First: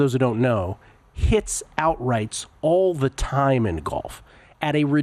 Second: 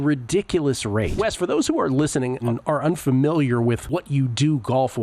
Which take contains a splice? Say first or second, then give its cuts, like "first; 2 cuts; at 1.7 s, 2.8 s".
second; 3 cuts; at 1.1 s, 2.5 s, 3.8 s